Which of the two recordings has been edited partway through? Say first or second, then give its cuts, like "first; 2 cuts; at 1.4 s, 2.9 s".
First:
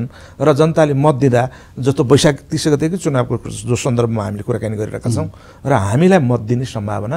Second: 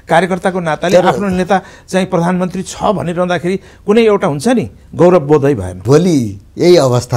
second; 1 cut; at 5.7 s